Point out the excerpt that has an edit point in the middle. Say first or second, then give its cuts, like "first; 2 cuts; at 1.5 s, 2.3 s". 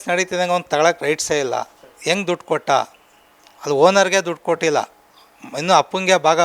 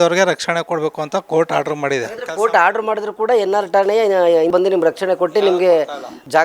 second; 1 cut; at 4.5 s